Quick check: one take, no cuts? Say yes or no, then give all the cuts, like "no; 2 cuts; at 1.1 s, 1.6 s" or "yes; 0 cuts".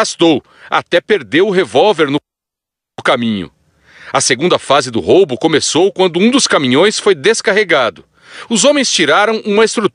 yes; 0 cuts